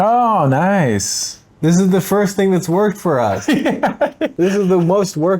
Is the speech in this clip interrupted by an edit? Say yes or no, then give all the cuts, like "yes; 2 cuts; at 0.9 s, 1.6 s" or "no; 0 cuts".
yes; 1 cut; at 4.3 s